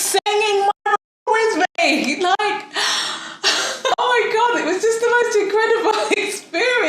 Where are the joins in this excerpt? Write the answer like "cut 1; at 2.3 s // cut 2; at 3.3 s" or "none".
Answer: cut 1; at 3.9 s